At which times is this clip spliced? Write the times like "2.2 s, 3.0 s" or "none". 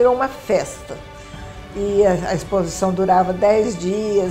none